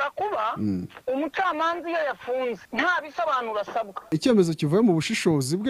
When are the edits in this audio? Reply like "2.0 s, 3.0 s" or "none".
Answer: 0.9 s, 2.6 s, 4.1 s